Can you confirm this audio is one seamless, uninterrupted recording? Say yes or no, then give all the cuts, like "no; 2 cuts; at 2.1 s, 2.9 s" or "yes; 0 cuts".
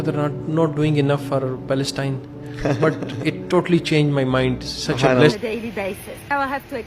no; 1 cut; at 5.3 s